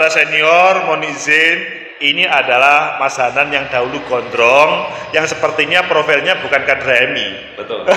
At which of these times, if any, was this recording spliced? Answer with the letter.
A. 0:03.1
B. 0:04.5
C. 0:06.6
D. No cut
D